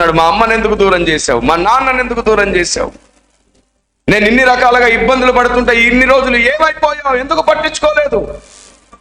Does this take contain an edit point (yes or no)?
no